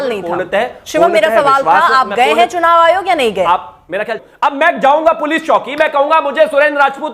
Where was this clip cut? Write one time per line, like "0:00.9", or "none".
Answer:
0:04.1